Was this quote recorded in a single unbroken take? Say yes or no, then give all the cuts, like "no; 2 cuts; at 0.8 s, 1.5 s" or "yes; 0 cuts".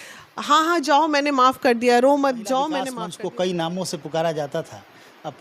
no; 1 cut; at 3.0 s